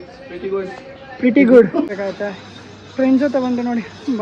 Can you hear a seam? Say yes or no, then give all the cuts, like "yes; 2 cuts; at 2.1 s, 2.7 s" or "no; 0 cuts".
yes; 1 cut; at 1.9 s